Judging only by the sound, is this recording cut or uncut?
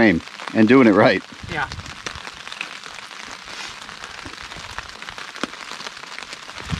uncut